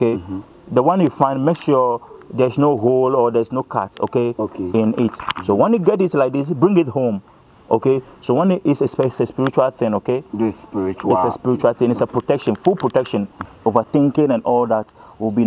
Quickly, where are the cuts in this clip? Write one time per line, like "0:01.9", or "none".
0:13.4